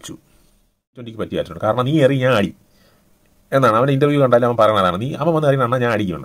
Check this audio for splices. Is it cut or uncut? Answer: cut